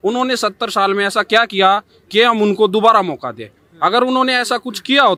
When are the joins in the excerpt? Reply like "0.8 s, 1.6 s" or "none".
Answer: none